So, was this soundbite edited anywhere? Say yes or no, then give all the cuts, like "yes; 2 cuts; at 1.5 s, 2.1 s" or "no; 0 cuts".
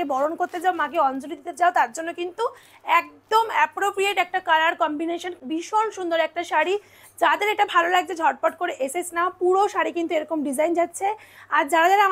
no; 0 cuts